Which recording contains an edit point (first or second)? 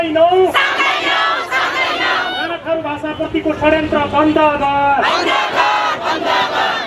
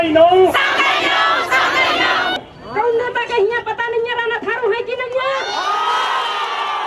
second